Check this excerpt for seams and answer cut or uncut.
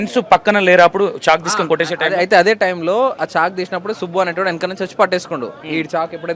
uncut